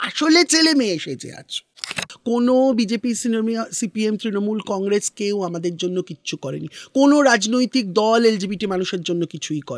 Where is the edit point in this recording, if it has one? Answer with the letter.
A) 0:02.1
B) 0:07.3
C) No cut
A